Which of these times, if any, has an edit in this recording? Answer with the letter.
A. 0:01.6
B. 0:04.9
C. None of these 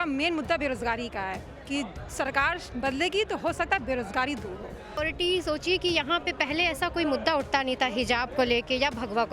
B